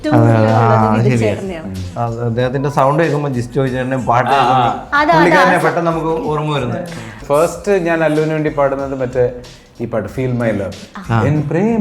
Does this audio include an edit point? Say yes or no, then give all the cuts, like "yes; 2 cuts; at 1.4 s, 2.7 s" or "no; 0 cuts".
yes; 2 cuts; at 1.9 s, 7.2 s